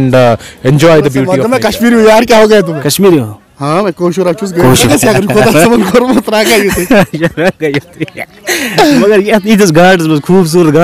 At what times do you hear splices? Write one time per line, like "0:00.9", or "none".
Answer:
0:01.4
0:04.9